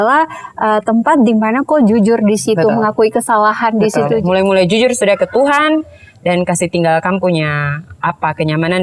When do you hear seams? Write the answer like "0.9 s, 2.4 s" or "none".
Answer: 4.2 s